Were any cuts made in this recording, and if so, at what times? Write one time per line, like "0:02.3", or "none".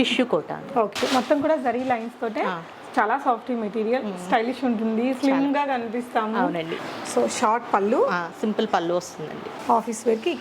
0:01.0
0:06.8
0:09.5

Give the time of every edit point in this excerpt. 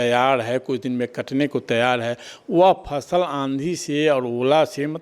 none

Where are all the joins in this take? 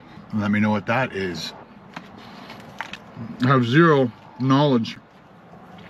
0:01.6

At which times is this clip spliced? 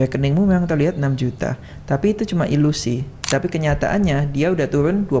none

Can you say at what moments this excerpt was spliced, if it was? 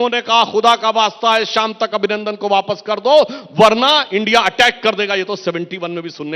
none

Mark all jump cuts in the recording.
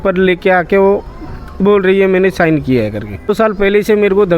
0:03.3

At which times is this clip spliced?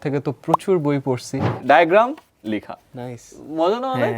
0:01.6

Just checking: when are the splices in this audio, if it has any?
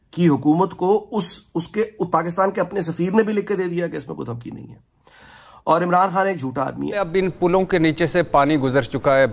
0:07.0

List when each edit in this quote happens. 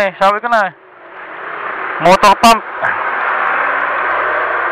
none

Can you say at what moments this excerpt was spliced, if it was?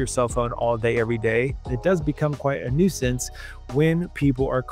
0:01.7

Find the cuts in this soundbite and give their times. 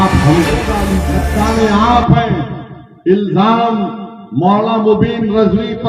0:01.0

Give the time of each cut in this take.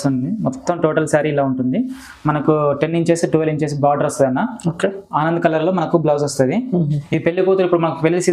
none

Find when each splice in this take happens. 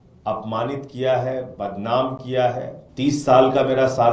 0:02.8

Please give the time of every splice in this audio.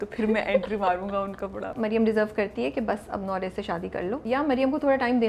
0:01.7
0:04.2

